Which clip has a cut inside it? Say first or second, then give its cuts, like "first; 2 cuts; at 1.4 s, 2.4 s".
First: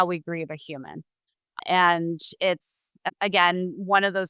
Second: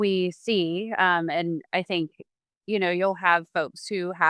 first; 2 cuts; at 1.6 s, 2.9 s